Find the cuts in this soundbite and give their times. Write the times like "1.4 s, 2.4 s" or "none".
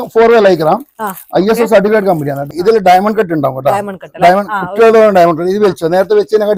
none